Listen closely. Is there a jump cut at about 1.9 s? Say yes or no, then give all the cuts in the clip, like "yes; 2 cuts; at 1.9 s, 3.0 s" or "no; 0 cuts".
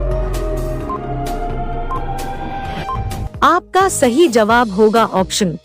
no; 1 cut; at 3.2 s